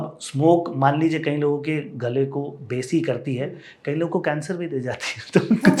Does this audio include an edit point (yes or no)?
no